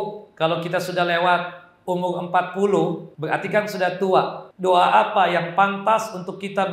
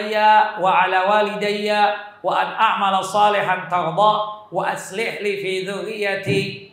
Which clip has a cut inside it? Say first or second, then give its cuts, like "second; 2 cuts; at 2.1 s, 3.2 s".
first; 2 cuts; at 3.1 s, 4.4 s